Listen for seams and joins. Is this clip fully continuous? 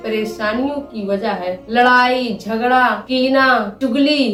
yes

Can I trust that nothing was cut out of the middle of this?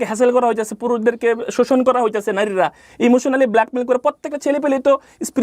yes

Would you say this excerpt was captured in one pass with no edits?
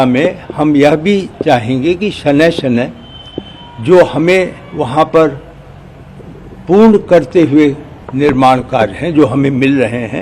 yes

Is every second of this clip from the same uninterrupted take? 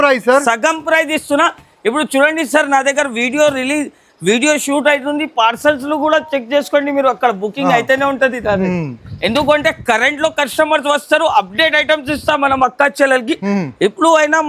yes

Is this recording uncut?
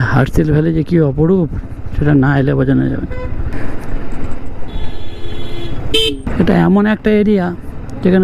no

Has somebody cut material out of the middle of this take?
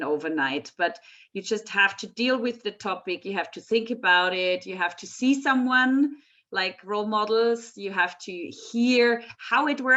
no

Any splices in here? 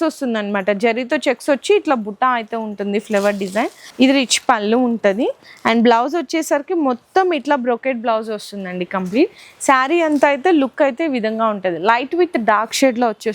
no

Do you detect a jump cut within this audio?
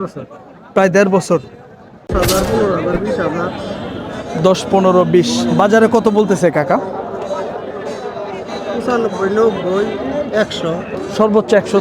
yes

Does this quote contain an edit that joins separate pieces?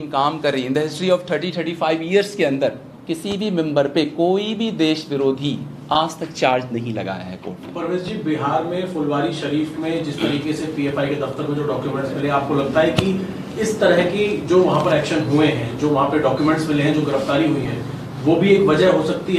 no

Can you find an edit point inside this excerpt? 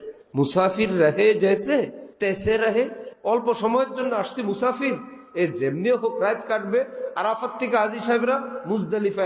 yes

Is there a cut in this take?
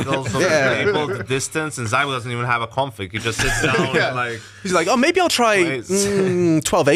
no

